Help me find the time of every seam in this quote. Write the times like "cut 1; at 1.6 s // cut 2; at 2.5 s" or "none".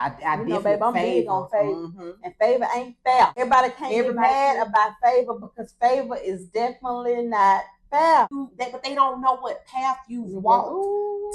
cut 1; at 3.4 s // cut 2; at 8.3 s